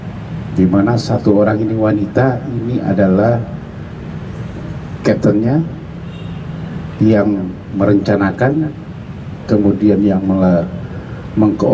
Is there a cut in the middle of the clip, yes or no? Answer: no